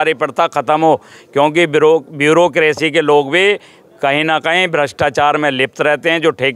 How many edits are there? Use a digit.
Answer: 0